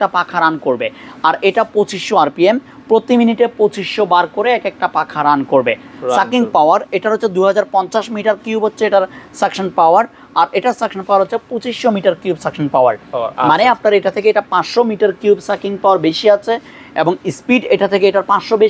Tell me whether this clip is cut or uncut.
uncut